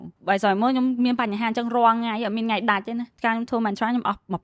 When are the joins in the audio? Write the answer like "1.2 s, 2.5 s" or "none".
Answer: 3.1 s